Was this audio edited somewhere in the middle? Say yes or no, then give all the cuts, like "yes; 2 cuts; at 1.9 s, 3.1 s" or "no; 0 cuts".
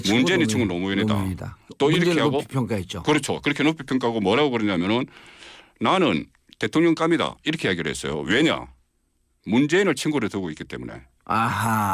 yes; 1 cut; at 11.0 s